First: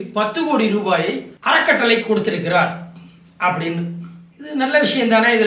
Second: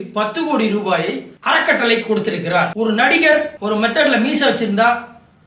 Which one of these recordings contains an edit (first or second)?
second